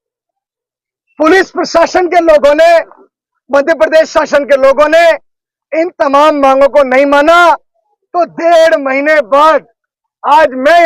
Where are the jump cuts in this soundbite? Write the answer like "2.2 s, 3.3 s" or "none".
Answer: none